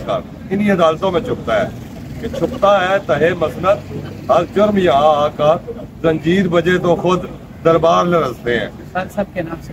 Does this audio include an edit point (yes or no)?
yes